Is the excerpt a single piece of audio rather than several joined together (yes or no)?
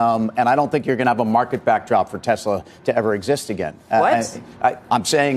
no